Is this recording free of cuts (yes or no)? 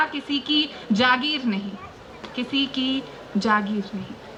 yes